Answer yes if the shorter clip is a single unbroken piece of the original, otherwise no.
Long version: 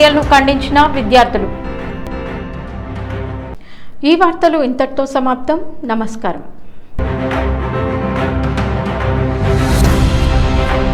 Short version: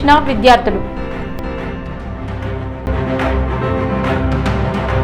no